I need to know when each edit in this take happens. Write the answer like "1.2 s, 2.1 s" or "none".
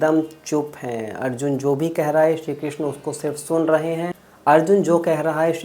4.3 s